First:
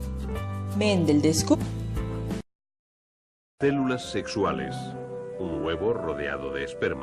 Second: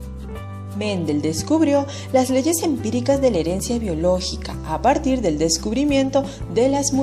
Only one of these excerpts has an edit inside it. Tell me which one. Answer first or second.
second